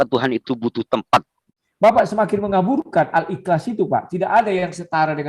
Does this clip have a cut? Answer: yes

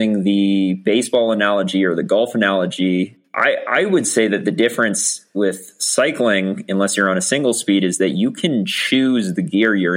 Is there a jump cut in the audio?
yes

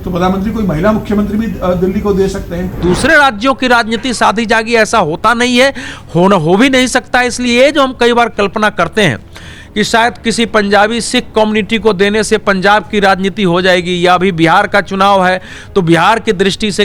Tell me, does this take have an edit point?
yes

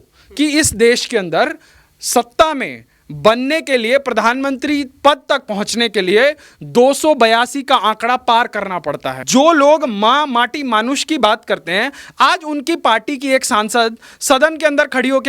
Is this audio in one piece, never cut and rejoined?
no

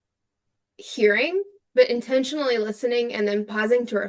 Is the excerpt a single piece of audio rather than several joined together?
yes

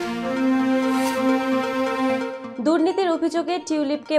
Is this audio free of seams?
yes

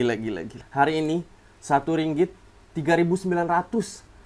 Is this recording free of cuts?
yes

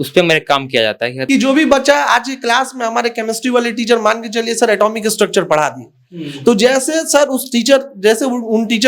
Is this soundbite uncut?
no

